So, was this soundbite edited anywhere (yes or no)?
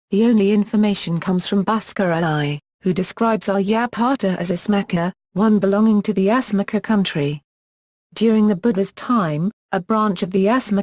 no